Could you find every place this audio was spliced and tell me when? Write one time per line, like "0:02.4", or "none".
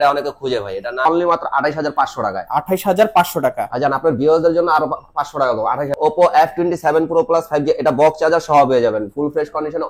0:01.1
0:05.9